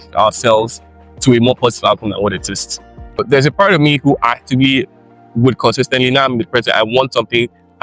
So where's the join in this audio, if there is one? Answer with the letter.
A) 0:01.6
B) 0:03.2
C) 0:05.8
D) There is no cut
B